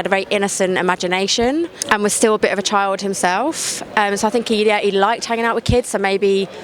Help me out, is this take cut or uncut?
uncut